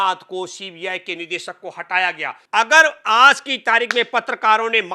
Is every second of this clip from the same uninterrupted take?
no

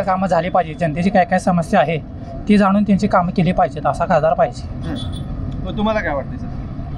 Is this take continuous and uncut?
yes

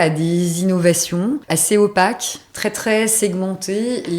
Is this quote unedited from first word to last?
no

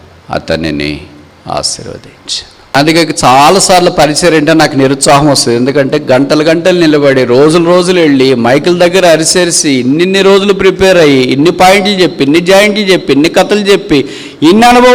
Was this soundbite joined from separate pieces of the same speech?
yes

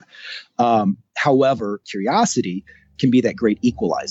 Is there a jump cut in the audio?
yes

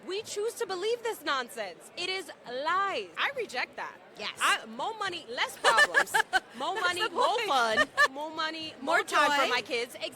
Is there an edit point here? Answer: yes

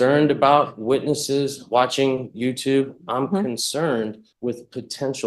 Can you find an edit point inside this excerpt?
yes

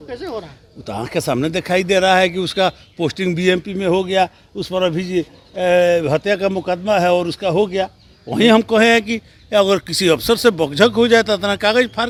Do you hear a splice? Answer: no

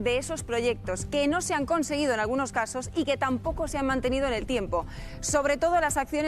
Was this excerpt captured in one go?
yes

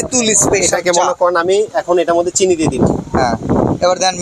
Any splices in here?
no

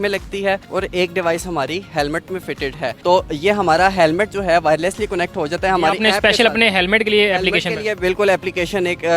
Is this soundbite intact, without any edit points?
yes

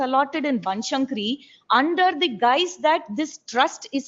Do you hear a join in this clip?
no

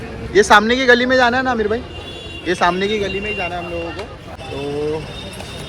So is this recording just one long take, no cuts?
no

